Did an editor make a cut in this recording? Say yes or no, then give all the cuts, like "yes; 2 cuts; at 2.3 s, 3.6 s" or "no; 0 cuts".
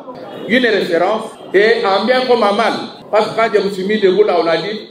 yes; 2 cuts; at 1.3 s, 2.9 s